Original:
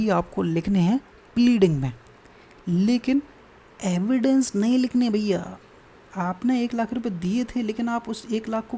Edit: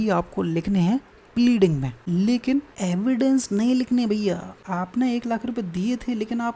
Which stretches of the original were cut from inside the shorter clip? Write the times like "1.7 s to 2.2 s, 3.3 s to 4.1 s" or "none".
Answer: 1.9 s to 2.5 s, 3.3 s to 3.8 s, 5.6 s to 6.0 s